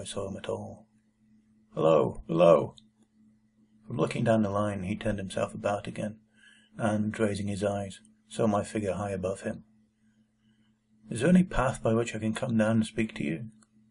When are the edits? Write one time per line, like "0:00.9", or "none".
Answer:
0:10.1